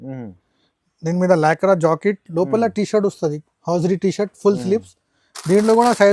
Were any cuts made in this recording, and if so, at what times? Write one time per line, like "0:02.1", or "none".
none